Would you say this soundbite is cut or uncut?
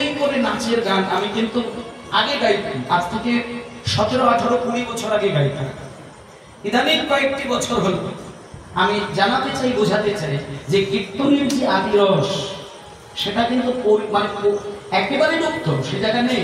uncut